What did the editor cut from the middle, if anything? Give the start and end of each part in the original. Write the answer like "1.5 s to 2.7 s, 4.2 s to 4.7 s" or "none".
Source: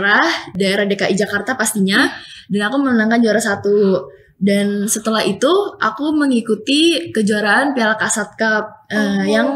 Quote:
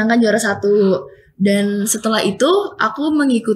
none